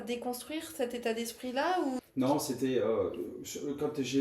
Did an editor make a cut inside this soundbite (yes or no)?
yes